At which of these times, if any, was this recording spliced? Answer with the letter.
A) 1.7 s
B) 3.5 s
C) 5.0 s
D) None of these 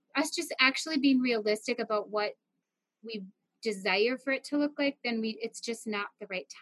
D